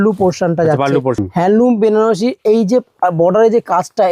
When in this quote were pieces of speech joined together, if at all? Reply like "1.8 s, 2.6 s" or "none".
1.2 s